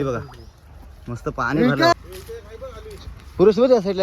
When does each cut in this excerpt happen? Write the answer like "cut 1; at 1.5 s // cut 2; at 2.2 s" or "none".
cut 1; at 1.9 s